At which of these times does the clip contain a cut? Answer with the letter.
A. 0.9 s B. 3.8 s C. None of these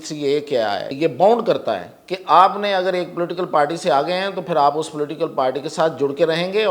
A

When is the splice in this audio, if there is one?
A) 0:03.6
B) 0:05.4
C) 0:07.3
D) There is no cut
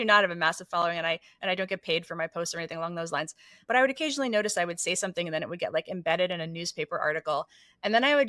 A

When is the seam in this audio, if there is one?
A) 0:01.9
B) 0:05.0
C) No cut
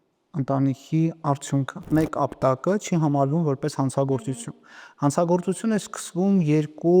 A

